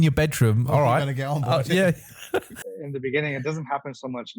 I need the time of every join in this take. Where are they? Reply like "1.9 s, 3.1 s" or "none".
2.6 s